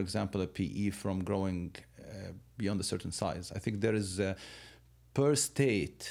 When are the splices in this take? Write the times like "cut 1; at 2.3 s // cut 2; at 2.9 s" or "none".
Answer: none

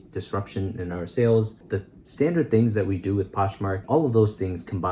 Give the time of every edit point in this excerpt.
cut 1; at 1.6 s // cut 2; at 3.8 s

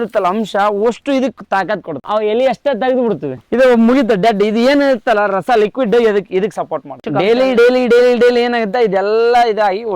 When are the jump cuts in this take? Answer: cut 1; at 2.0 s // cut 2; at 3.3 s // cut 3; at 7.0 s

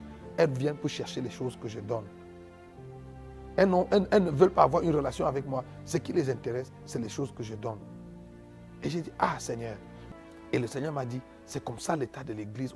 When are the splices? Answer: cut 1; at 9.9 s

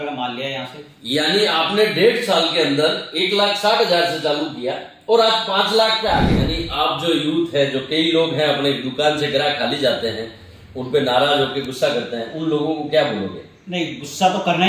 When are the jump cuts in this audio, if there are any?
cut 1; at 6.6 s

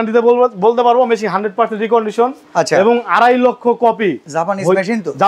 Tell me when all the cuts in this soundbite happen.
none

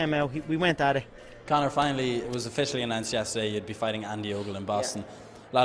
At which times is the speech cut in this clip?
cut 1; at 1.9 s

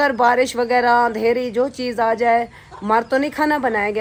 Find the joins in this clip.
none

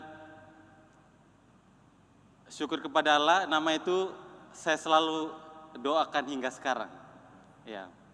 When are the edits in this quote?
none

